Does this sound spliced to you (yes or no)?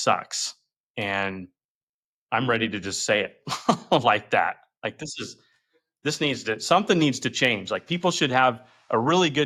no